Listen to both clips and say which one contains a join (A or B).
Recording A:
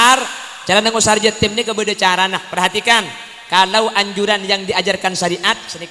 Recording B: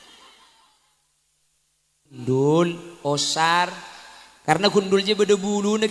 B